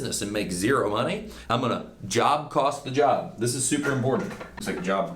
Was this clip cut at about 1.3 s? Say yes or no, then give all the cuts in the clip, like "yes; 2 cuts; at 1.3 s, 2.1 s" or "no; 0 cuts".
yes; 1 cut; at 1.3 s